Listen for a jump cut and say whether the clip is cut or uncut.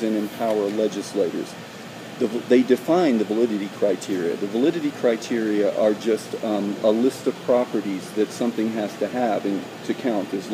uncut